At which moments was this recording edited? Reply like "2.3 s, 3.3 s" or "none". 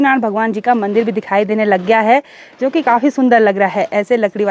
none

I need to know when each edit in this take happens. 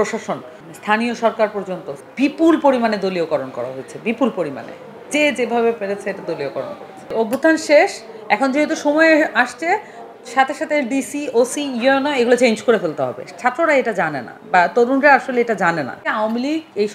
2.0 s, 7.1 s, 16.1 s

